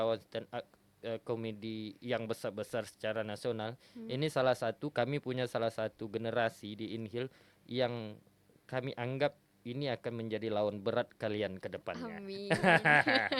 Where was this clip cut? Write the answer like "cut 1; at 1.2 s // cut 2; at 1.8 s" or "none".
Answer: none